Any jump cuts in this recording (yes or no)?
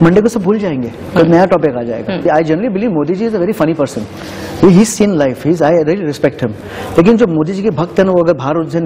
yes